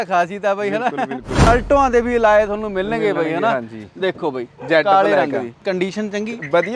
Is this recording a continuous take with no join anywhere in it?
no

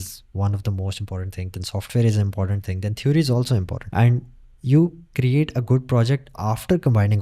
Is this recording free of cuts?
yes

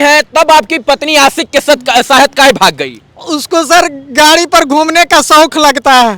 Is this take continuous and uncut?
yes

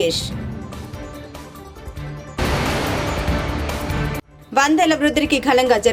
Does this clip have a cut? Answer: no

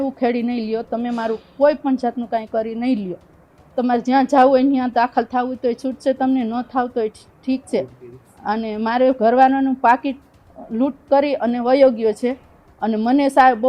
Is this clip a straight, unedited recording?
yes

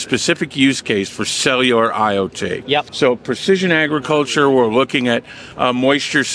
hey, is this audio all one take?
no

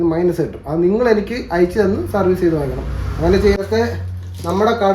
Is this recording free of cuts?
no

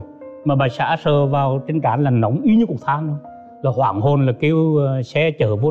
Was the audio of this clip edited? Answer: no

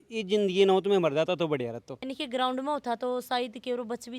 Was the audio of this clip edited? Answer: yes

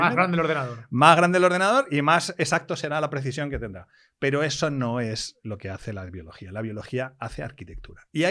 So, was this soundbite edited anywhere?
no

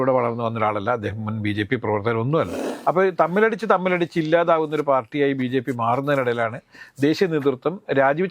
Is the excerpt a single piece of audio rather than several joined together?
no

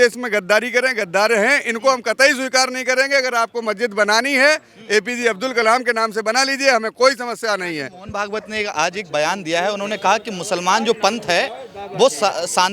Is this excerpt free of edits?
yes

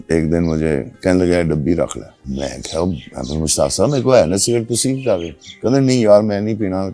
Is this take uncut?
no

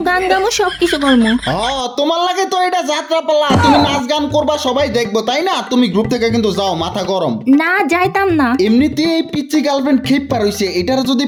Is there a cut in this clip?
no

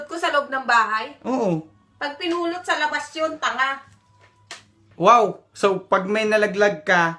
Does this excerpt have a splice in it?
yes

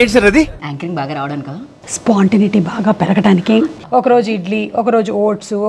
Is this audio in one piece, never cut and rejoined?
no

